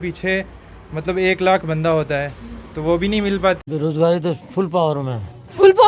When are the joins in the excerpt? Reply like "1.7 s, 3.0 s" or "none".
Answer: 3.6 s